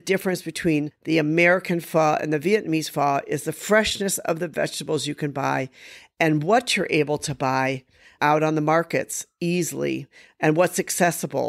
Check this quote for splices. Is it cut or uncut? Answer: cut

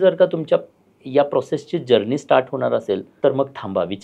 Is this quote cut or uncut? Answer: cut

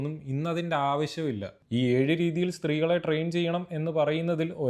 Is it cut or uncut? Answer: uncut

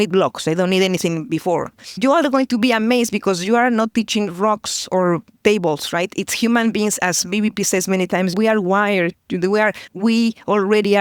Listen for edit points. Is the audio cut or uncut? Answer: cut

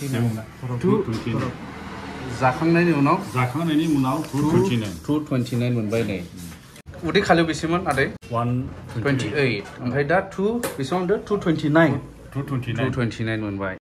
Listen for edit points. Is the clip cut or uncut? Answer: uncut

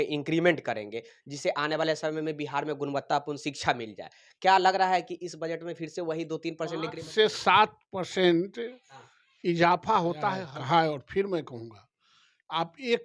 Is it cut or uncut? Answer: cut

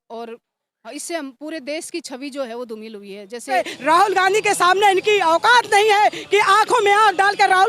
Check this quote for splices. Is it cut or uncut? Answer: cut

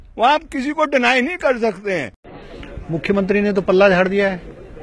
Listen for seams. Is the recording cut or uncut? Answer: cut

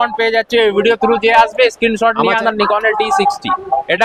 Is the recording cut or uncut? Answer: cut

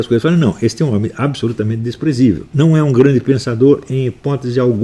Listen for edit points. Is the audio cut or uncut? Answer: cut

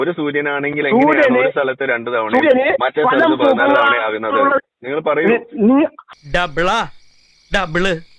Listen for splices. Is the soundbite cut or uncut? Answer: cut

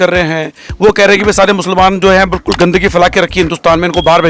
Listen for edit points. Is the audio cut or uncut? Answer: uncut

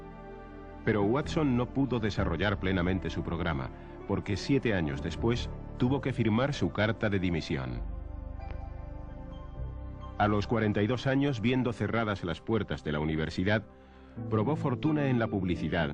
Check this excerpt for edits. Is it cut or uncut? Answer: cut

